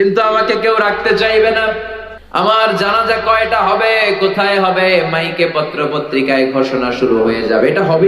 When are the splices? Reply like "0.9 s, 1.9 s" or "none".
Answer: none